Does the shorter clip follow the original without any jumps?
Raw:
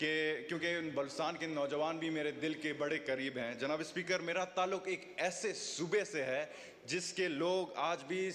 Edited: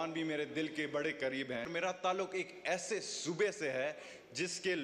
no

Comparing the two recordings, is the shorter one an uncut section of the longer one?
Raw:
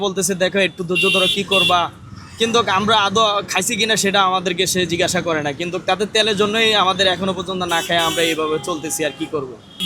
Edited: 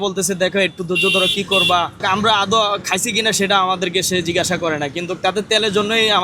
no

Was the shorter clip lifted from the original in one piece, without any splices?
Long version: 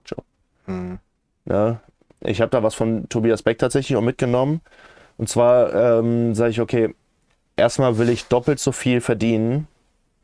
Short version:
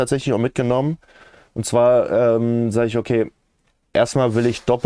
yes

